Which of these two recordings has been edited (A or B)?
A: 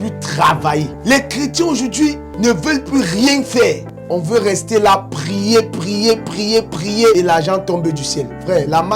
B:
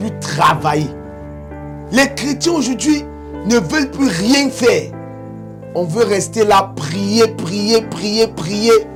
A